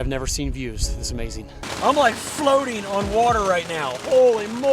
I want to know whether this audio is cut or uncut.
cut